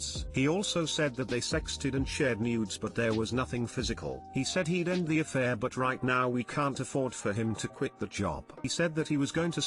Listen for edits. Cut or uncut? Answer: cut